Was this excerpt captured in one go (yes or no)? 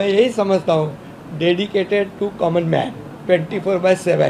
yes